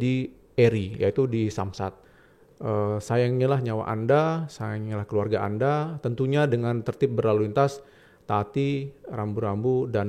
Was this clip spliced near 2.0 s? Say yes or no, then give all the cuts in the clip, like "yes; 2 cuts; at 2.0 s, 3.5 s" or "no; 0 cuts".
yes; 1 cut; at 2.0 s